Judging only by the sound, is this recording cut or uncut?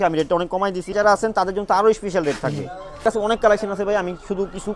cut